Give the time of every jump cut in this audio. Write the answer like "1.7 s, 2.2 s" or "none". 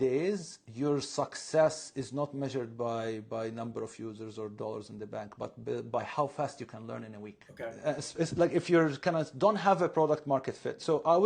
none